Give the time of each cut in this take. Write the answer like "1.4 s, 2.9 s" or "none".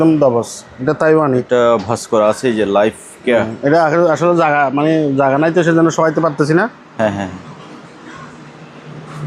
none